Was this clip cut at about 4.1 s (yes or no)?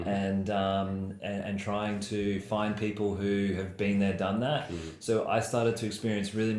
no